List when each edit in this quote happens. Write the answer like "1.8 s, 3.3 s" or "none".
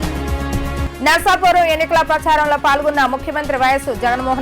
0.9 s